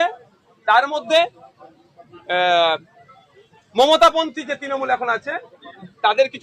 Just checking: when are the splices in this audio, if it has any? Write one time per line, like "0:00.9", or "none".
none